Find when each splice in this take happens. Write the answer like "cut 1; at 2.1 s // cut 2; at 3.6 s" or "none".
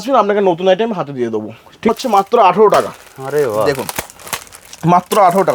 cut 1; at 1.9 s